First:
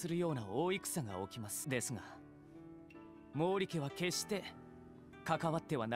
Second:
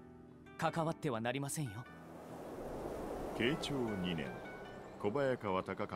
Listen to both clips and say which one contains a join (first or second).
first